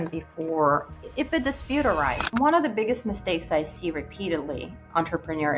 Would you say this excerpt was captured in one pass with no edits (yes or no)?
no